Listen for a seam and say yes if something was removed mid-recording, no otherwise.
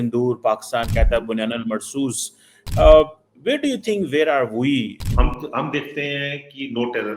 yes